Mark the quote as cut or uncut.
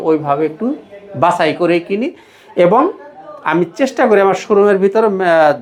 uncut